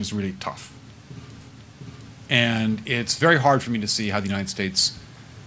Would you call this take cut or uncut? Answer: cut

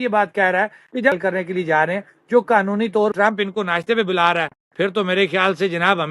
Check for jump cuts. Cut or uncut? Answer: cut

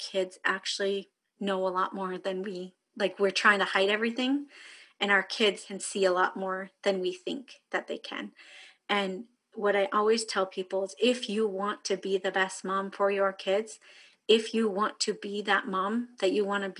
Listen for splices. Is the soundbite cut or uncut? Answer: cut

